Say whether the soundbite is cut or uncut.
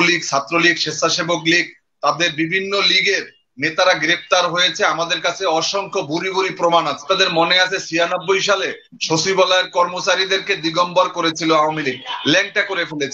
cut